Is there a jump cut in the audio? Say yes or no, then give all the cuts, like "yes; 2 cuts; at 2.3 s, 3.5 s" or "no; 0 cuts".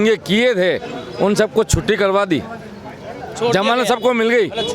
no; 0 cuts